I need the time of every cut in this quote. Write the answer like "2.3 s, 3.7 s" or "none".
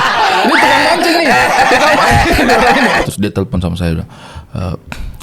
3.0 s